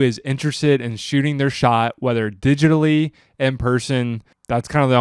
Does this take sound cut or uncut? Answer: uncut